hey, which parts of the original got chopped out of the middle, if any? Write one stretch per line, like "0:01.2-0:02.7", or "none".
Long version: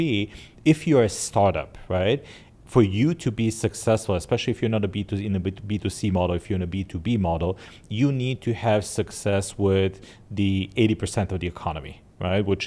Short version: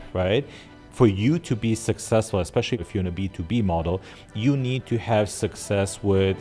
0:04.6-0:06.4